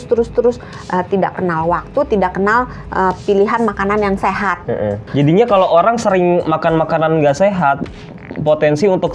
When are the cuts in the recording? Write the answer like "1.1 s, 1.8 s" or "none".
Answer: 5.1 s